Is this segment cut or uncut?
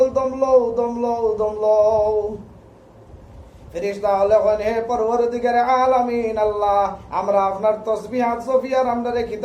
uncut